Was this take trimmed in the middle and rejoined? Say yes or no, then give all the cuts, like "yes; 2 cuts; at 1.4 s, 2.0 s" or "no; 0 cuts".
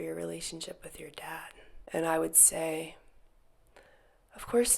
no; 0 cuts